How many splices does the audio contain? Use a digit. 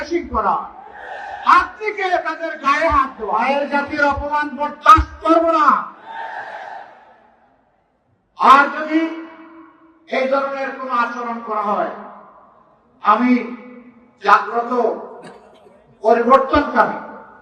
1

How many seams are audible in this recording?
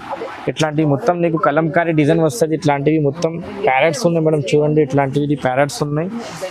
0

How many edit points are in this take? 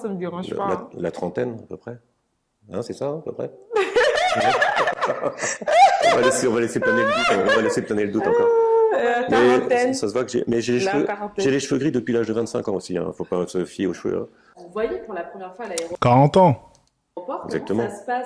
0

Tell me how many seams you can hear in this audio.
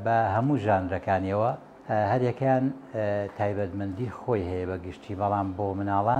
1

